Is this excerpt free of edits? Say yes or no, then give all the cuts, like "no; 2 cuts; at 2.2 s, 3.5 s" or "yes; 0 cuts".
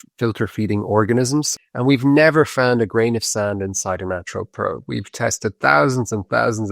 no; 1 cut; at 1.5 s